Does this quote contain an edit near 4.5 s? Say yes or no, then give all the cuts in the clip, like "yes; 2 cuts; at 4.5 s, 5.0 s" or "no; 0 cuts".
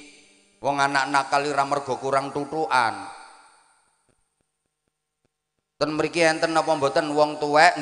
no; 0 cuts